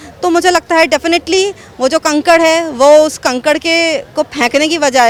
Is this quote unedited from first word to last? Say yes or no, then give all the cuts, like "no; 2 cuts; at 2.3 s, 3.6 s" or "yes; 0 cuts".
yes; 0 cuts